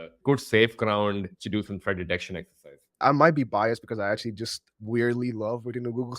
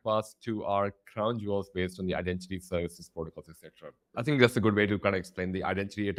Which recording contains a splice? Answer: first; 2 cuts; at 3.0 s, 4.6 s

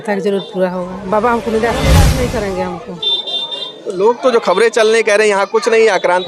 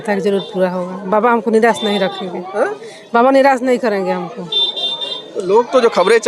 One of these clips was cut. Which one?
first; 1 cut; at 2.0 s

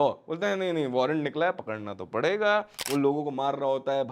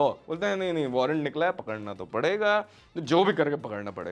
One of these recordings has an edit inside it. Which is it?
first; 1 cut; at 2.8 s

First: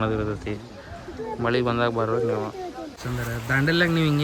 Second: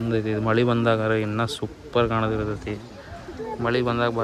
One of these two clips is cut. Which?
first; 1 cut; at 3.0 s

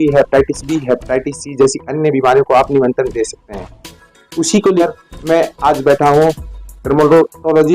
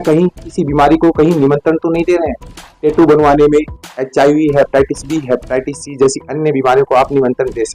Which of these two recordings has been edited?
first; 1 cut; at 4.8 s

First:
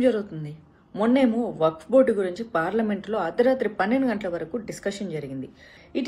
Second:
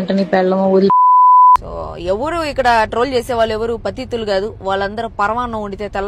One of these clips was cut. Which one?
second; 1 cut; at 1.6 s

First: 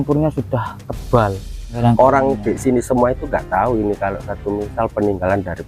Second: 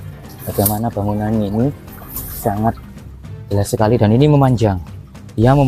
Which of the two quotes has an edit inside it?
first; 1 cut; at 1.7 s

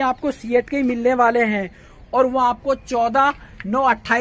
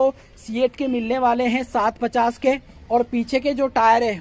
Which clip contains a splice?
second; 1 cut; at 2.7 s

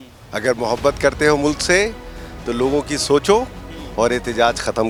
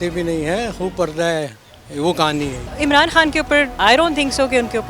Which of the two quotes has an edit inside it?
second; 2 cuts; at 2.6 s, 3.7 s

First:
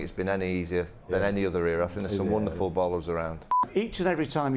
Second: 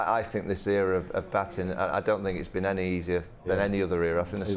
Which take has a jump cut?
first; 1 cut; at 3.6 s

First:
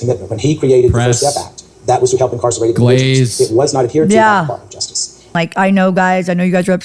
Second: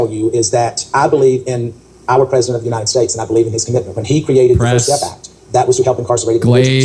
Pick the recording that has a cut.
first; 1 cut; at 5.3 s

